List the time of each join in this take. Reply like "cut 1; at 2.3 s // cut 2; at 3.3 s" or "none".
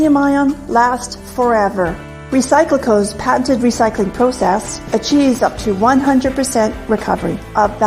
cut 1; at 1.0 s